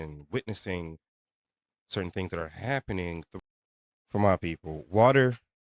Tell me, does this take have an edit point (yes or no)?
yes